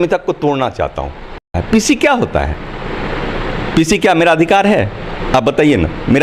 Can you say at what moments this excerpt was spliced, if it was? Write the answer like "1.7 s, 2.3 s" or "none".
1.6 s